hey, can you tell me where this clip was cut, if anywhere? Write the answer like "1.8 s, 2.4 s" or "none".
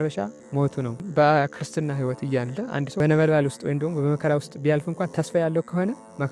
1.0 s